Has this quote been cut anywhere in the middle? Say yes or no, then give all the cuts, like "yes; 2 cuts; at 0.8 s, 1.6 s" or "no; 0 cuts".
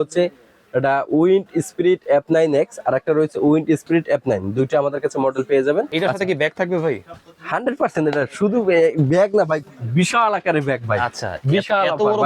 yes; 1 cut; at 5.9 s